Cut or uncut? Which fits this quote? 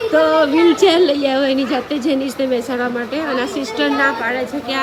uncut